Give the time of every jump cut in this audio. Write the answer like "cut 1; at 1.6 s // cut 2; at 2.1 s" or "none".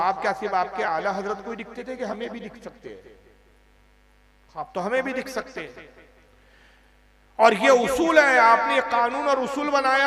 none